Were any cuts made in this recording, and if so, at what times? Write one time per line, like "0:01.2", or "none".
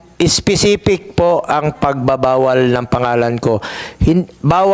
none